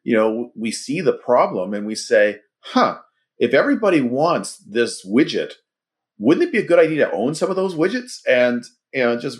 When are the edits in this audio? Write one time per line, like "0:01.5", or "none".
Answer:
none